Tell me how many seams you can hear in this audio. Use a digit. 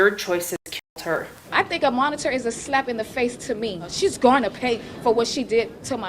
2